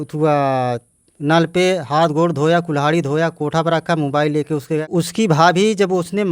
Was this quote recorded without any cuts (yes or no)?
no